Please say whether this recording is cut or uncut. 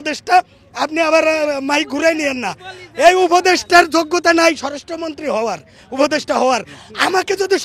uncut